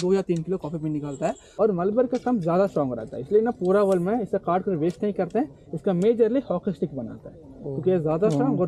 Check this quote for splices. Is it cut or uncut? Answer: cut